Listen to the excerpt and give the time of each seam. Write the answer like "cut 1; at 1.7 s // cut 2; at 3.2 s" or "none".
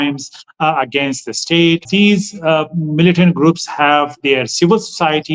cut 1; at 1.8 s

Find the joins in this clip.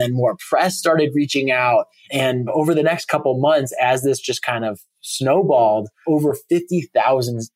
cut 1; at 2.2 s // cut 2; at 5.9 s

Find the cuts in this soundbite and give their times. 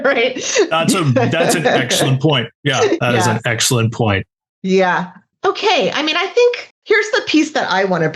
cut 1; at 5.3 s // cut 2; at 6.7 s

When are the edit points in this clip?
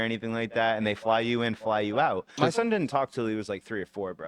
cut 1; at 2.3 s

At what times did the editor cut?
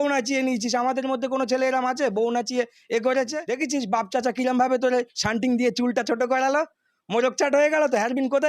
cut 1; at 3.4 s

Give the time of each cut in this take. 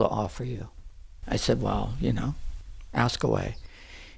cut 1; at 1.2 s

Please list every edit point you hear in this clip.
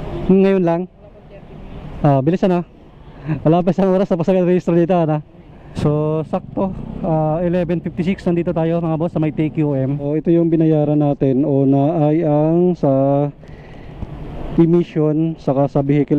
cut 1; at 5.7 s // cut 2; at 10.1 s

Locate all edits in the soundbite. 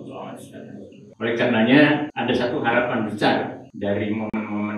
cut 1; at 1.0 s // cut 2; at 2.1 s // cut 3; at 3.6 s

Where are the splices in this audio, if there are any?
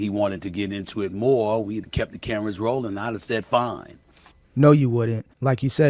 none

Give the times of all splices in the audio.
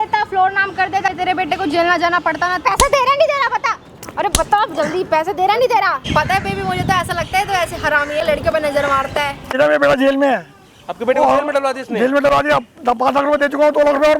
cut 1; at 1.1 s // cut 2; at 2.7 s // cut 3; at 6.0 s // cut 4; at 8.2 s // cut 5; at 9.6 s

